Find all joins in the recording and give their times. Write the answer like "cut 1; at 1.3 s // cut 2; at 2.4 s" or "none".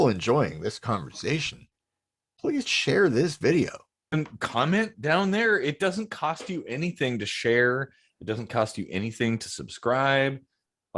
cut 1; at 4.1 s